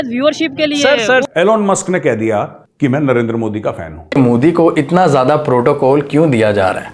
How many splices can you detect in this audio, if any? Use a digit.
2